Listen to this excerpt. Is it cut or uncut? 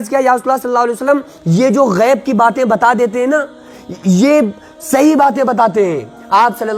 uncut